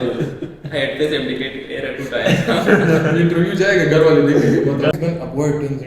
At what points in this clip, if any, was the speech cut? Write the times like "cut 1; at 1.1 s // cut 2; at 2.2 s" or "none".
cut 1; at 4.9 s